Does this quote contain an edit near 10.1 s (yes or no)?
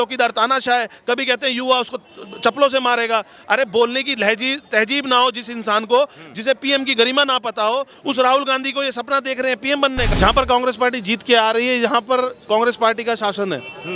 yes